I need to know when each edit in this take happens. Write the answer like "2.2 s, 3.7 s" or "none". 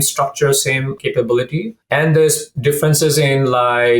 0.9 s, 1.8 s